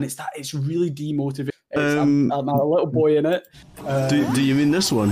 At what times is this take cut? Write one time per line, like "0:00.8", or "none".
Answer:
0:01.5